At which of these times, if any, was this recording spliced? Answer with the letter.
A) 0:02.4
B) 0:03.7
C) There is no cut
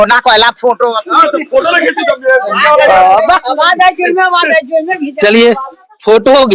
C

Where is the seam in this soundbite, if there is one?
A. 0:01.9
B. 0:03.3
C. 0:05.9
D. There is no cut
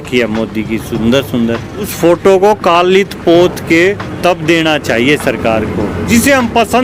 A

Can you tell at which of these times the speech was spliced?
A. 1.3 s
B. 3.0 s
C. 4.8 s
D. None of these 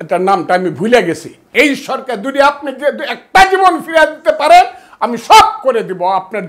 A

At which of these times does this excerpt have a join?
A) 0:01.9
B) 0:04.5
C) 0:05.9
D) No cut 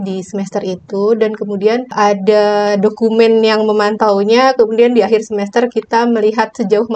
A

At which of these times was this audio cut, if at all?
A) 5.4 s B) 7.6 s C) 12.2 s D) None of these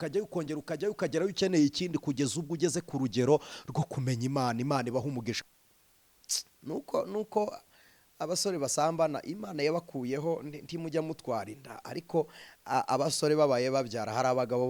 A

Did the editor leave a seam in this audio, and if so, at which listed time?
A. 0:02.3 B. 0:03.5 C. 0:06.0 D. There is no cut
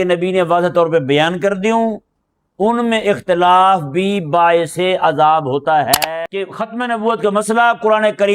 C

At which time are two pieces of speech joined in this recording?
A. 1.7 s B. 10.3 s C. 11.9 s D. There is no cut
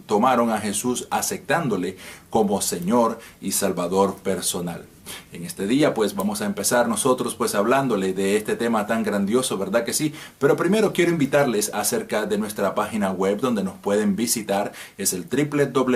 D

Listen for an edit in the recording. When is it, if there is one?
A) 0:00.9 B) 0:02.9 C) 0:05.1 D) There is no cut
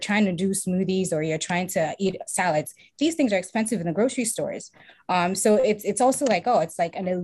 D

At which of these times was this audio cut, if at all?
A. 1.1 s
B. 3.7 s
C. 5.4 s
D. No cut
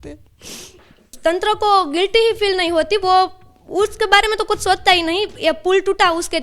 A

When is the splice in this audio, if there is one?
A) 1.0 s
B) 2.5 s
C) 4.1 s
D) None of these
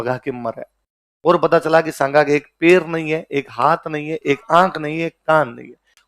D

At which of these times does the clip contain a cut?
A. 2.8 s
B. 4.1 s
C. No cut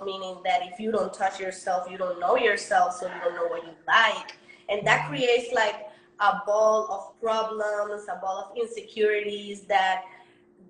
C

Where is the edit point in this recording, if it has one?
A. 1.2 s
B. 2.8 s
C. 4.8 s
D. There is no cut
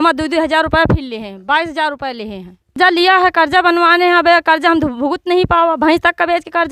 B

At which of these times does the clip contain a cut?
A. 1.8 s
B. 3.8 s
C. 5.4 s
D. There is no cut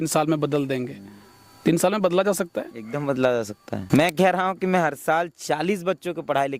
B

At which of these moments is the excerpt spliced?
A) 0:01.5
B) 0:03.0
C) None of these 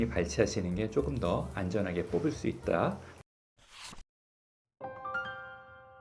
B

